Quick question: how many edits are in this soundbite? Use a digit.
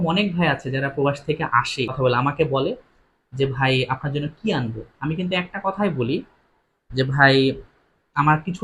1